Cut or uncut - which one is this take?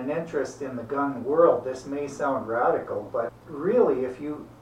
cut